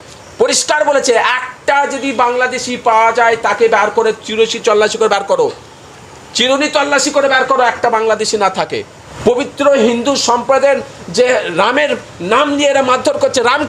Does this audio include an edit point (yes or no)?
yes